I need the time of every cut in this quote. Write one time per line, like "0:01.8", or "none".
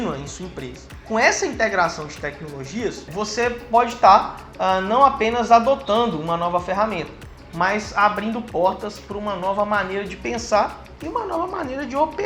0:03.1